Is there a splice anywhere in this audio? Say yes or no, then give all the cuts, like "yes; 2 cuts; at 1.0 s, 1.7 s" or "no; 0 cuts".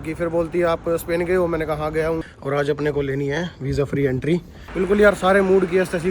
yes; 2 cuts; at 2.3 s, 4.6 s